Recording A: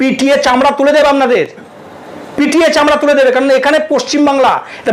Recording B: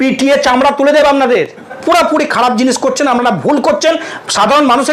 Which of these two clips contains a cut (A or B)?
B